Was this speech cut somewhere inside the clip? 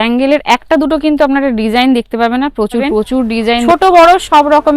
yes; 1 cut; at 3.7 s

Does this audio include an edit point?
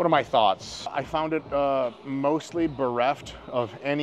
yes; 1 cut; at 1.0 s

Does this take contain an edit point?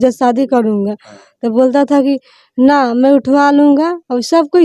no; 0 cuts

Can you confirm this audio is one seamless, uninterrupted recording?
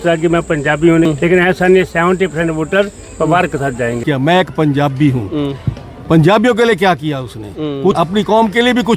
no; 3 cuts; at 1.1 s, 4.0 s, 7.9 s

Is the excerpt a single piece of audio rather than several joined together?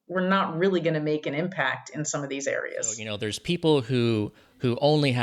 no; 1 cut; at 3.1 s

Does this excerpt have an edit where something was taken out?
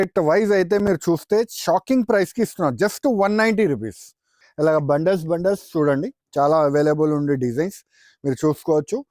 yes; 1 cut; at 4.4 s

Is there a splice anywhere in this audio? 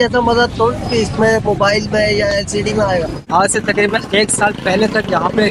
yes; 1 cut; at 3.2 s

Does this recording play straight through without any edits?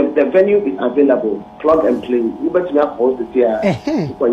yes; 0 cuts

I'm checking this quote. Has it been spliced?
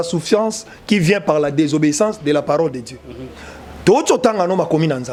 no; 0 cuts

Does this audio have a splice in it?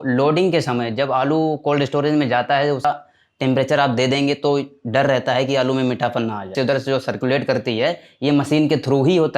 yes; 2 cuts; at 2.8 s, 6.5 s

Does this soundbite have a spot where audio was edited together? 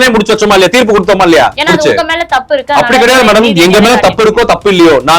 yes; 1 cut; at 1.6 s

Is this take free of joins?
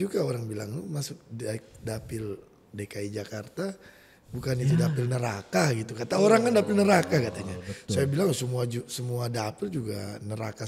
yes; 0 cuts

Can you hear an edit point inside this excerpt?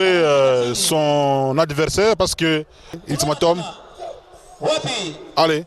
yes; 1 cut; at 3.0 s

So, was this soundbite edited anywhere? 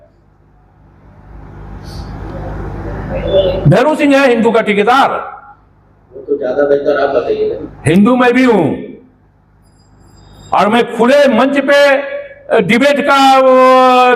no; 0 cuts

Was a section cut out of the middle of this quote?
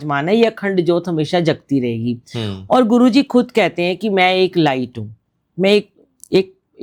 no; 0 cuts

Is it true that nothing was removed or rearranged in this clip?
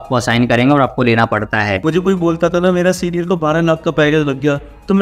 no; 1 cut; at 1.8 s

